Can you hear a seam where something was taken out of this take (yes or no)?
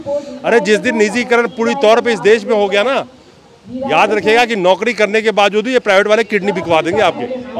no